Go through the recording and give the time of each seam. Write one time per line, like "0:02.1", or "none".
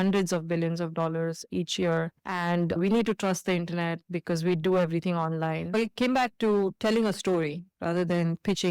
0:01.5
0:02.8
0:05.7